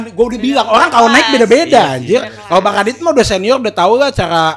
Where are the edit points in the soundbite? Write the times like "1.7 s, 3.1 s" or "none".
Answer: none